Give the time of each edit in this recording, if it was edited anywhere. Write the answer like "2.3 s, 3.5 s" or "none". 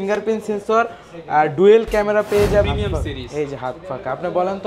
2.7 s